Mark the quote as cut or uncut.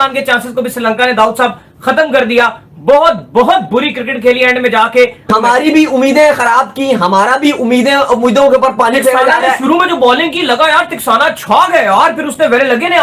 cut